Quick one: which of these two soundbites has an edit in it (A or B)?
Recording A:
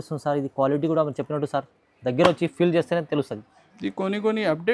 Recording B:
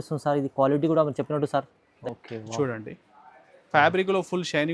B